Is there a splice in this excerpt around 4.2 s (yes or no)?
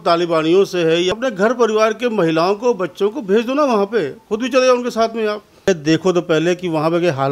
no